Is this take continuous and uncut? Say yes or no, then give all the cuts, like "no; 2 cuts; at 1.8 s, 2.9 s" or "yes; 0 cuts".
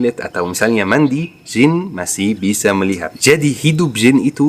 no; 1 cut; at 3.1 s